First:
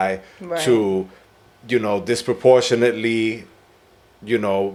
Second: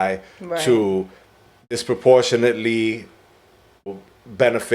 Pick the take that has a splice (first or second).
second